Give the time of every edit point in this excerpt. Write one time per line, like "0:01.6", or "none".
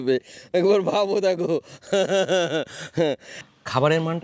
0:03.3